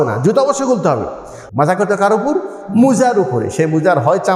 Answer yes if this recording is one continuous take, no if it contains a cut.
no